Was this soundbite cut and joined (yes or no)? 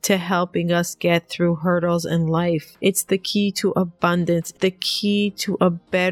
yes